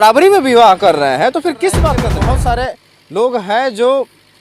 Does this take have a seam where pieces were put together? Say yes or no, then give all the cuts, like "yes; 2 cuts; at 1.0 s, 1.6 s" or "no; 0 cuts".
yes; 1 cut; at 2.0 s